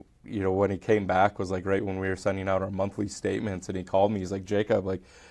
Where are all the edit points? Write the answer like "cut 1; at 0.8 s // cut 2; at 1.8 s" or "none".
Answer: none